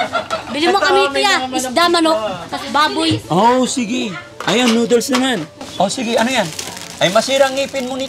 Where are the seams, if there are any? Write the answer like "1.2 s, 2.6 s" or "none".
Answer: 5.6 s